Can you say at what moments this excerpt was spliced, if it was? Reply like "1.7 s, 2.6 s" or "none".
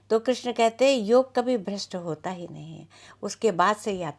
none